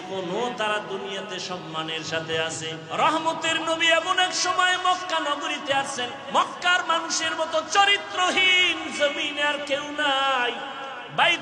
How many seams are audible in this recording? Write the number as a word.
one